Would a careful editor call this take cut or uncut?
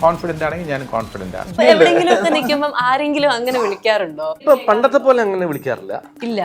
cut